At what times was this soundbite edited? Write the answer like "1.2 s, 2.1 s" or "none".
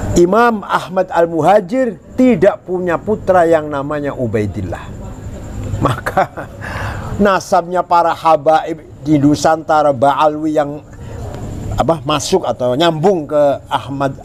none